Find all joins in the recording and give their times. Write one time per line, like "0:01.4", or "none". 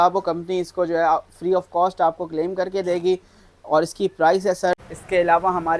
0:04.7